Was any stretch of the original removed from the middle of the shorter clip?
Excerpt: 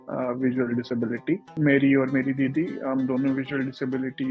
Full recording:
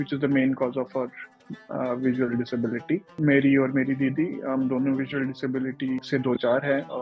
no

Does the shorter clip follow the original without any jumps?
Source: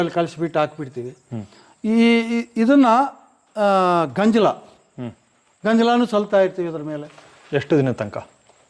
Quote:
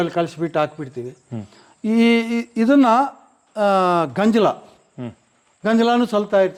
yes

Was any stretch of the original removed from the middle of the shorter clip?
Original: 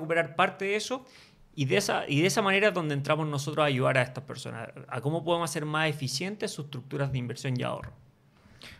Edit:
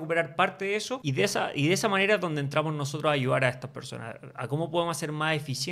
yes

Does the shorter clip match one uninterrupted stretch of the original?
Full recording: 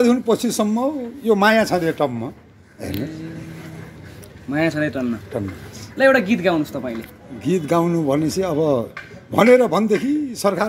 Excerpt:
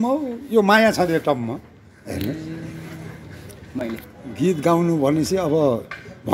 no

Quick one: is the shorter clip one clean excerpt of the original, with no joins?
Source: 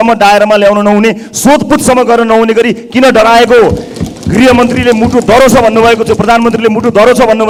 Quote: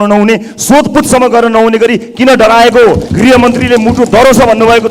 no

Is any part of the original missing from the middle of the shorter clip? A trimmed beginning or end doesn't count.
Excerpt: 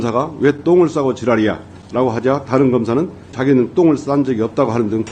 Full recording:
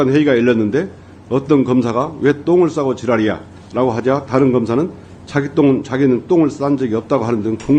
yes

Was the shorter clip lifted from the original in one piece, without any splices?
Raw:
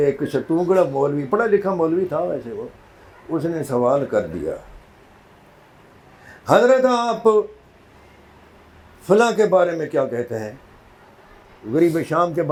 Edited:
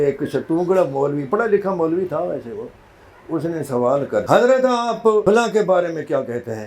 no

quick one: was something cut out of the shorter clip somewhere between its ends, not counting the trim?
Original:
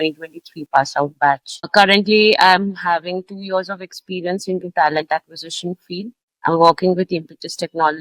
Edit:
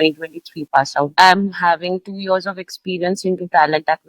yes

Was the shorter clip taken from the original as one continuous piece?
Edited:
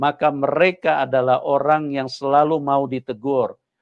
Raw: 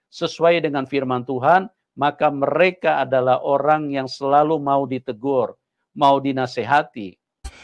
yes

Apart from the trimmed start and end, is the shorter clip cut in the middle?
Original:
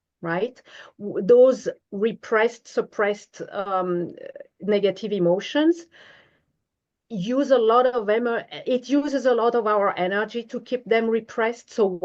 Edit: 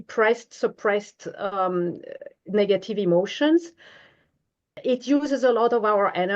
yes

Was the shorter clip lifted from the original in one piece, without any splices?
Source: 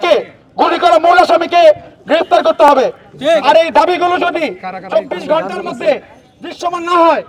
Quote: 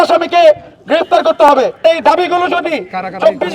no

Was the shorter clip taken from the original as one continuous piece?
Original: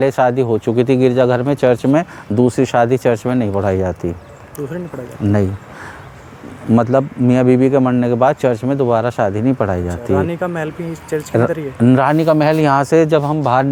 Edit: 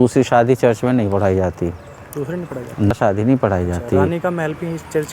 no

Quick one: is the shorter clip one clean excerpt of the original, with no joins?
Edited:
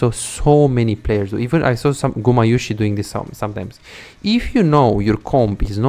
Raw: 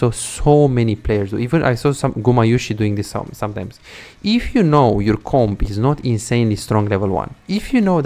yes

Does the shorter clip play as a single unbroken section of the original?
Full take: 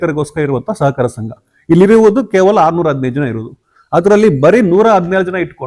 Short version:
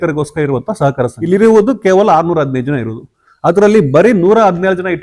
no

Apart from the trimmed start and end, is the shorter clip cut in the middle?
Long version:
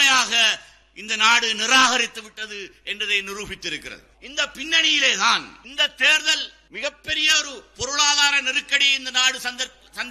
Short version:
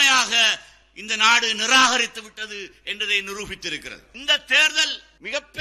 yes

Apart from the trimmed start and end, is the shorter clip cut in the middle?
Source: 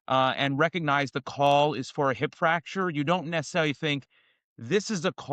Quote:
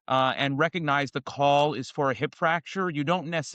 no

